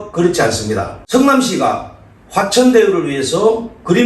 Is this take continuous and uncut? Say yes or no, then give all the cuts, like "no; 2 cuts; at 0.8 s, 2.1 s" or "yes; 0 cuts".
no; 1 cut; at 1.0 s